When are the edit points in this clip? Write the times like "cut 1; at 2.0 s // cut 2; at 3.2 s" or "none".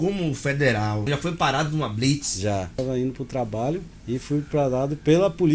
cut 1; at 1.0 s // cut 2; at 2.8 s // cut 3; at 3.9 s